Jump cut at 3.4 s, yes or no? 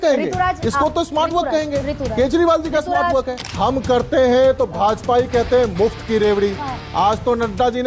yes